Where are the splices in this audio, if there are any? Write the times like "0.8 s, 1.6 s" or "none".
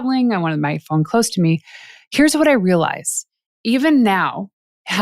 3.4 s